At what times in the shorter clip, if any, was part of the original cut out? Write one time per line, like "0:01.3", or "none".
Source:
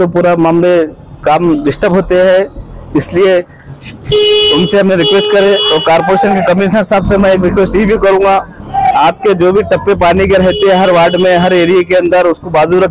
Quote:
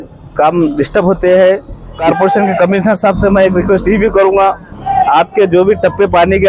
0:02.0

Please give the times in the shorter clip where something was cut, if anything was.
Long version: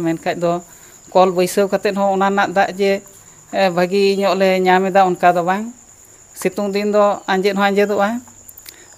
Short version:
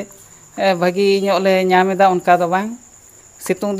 none

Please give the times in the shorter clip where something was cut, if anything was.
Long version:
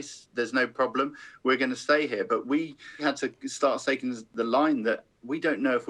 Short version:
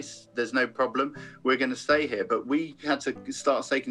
0:02.7

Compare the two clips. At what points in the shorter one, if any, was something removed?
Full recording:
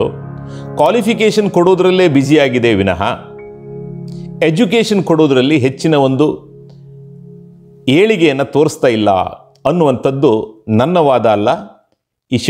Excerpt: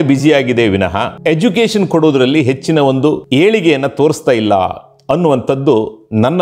0:01.1
0:03.2

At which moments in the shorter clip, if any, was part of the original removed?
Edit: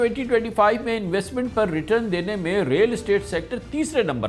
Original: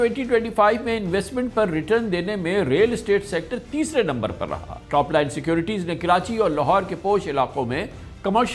none

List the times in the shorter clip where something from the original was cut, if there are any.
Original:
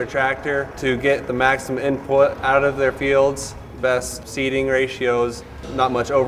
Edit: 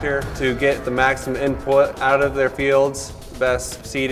none

